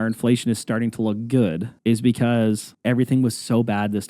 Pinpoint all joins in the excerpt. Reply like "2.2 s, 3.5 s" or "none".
1.7 s, 2.7 s